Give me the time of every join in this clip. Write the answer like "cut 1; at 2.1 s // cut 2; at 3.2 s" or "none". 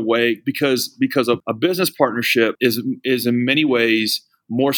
cut 1; at 1.4 s // cut 2; at 2.6 s